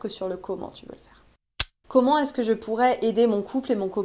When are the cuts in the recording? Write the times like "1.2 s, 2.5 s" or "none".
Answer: 1.8 s